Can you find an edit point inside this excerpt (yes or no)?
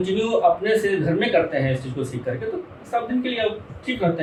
no